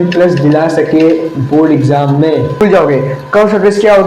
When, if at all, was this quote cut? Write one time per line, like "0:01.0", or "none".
0:02.6